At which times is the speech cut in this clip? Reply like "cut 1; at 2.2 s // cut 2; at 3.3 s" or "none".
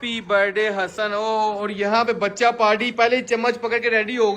none